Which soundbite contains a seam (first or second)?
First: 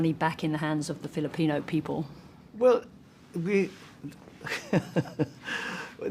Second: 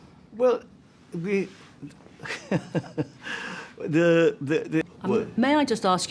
second